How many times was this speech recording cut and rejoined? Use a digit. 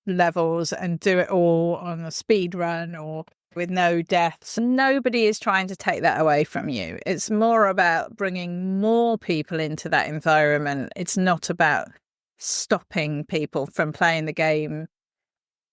0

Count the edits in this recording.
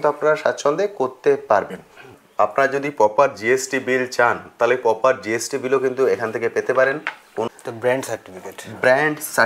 2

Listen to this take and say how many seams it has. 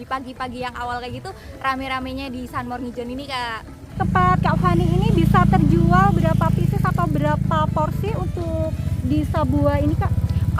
1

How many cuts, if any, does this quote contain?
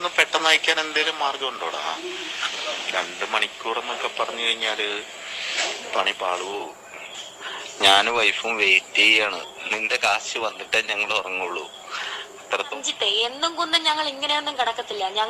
2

